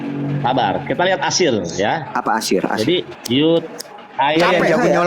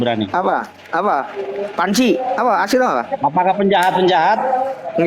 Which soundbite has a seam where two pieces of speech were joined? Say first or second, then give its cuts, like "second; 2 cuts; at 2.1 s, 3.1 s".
first; 1 cut; at 3.6 s